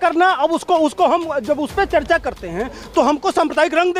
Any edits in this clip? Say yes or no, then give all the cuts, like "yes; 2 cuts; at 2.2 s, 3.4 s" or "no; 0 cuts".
no; 0 cuts